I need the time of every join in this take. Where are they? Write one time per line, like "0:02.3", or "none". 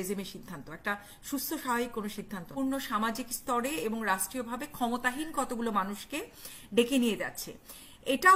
0:02.5